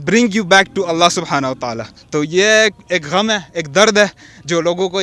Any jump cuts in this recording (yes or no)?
no